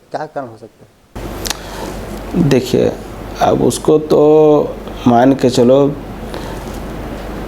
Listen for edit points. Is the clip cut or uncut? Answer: uncut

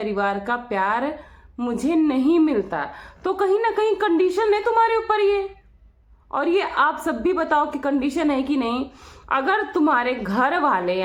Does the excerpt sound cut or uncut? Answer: uncut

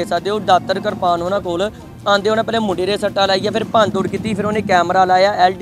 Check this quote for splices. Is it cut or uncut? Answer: uncut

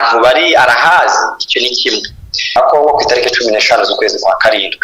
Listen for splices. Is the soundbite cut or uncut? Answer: cut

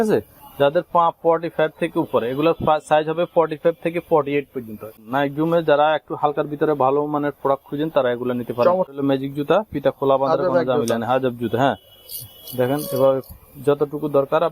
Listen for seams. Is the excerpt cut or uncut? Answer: cut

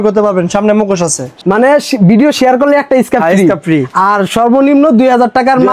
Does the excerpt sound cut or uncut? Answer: cut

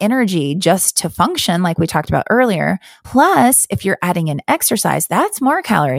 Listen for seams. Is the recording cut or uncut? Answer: cut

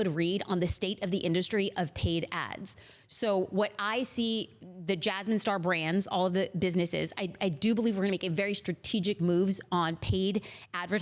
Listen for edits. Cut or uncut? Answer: uncut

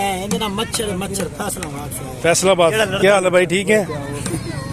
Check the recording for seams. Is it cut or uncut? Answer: uncut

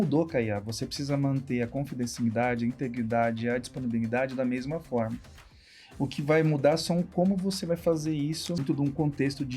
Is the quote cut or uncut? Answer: cut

